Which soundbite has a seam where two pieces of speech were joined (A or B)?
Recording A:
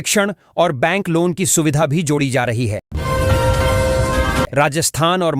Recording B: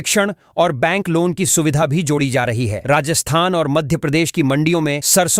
A